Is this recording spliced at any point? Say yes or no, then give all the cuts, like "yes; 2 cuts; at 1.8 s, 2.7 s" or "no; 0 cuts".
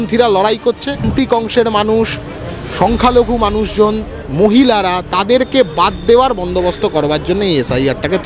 yes; 1 cut; at 1.0 s